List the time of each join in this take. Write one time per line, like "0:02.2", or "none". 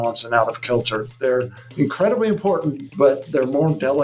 0:02.8

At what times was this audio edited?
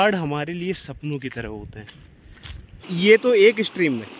0:02.8

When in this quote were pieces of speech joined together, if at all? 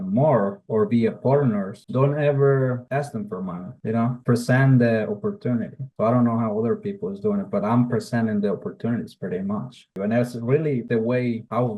0:01.8
0:09.9

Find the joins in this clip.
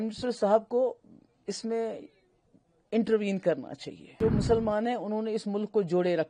0:04.2

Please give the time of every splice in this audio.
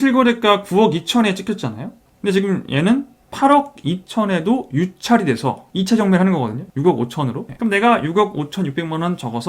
0:02.0
0:07.5

